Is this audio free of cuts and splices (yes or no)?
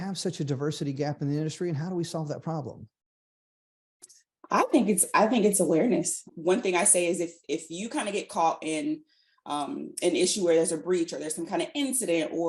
no